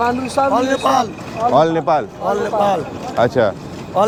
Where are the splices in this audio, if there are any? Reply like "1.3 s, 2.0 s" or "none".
none

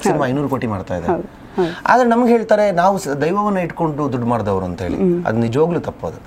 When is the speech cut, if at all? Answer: none

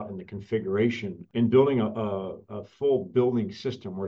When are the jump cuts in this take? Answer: 1.2 s

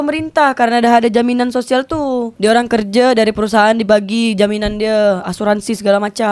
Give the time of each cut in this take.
none

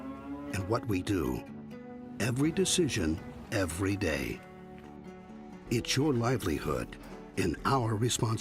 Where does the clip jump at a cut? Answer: none

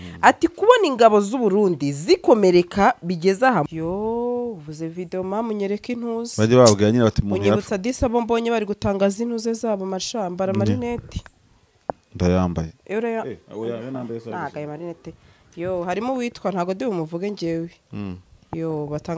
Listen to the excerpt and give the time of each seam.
3.7 s

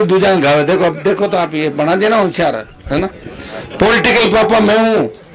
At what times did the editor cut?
none

